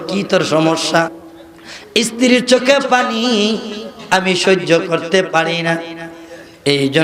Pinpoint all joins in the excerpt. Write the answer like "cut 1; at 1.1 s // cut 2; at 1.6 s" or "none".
cut 1; at 1.2 s